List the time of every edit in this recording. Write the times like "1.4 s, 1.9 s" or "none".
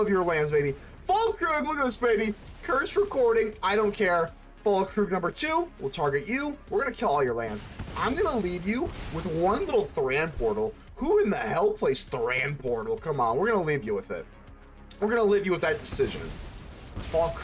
none